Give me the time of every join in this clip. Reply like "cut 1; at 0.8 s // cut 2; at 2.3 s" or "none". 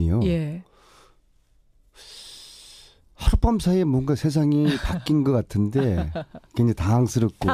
none